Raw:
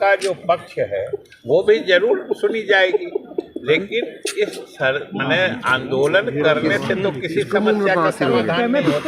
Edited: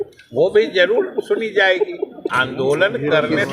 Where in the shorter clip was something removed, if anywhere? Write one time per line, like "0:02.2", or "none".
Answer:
0:02.3